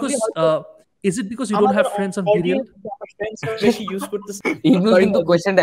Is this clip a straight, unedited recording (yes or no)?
no